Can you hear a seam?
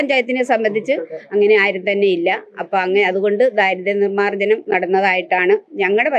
no; 0 cuts

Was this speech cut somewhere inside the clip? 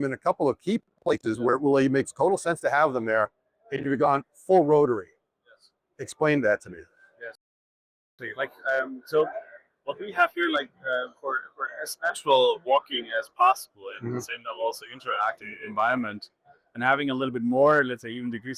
no; 0 cuts

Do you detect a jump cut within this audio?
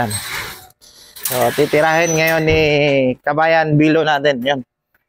no; 0 cuts

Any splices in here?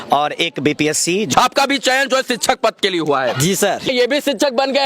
yes; 2 cuts; at 1.3 s, 3.9 s

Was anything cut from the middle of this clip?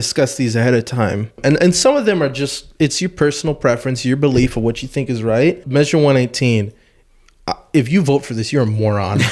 yes; 2 cuts; at 1.4 s, 5.6 s

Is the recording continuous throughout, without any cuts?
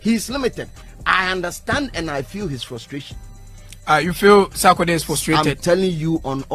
yes; 0 cuts

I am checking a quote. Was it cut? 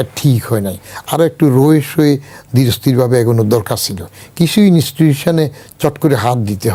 no; 0 cuts

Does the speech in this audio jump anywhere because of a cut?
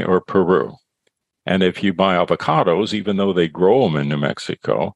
no; 0 cuts

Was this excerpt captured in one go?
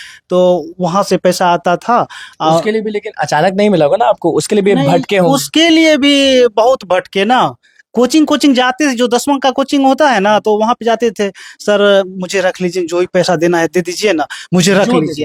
yes; 0 cuts

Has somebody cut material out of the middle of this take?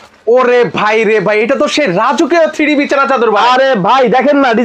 no; 0 cuts

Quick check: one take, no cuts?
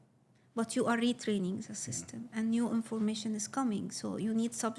yes; 0 cuts

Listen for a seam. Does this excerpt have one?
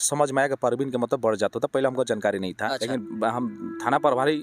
yes; 1 cut; at 2.8 s

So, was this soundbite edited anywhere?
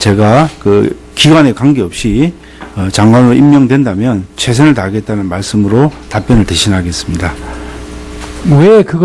yes; 1 cut; at 7.5 s

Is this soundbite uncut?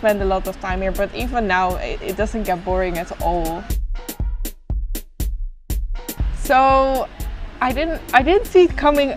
yes; 0 cuts

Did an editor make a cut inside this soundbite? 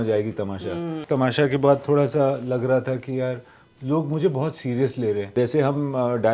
yes; 2 cuts; at 1.0 s, 5.3 s

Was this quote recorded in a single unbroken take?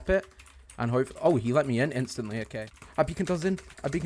no; 1 cut; at 2.4 s

